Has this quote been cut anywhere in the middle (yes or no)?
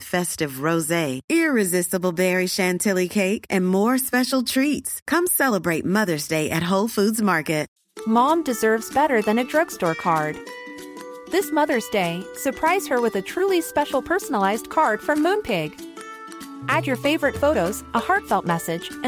yes